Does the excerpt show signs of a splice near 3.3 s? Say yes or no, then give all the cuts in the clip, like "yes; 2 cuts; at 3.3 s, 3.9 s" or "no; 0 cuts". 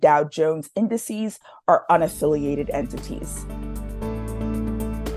yes; 1 cut; at 3.3 s